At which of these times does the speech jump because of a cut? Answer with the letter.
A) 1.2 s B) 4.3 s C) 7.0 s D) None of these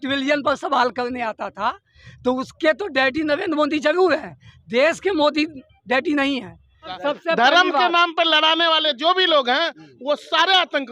C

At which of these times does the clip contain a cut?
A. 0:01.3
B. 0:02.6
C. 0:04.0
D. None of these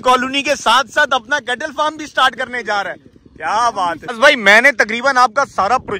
D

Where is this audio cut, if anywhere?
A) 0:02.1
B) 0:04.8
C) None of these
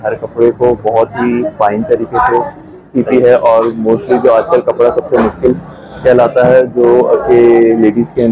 C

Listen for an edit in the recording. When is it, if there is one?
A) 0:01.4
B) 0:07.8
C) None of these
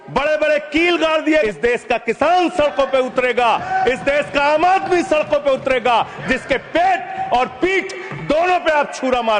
A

